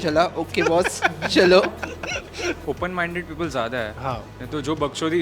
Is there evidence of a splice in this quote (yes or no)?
yes